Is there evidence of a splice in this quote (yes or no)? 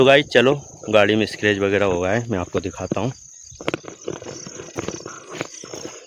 no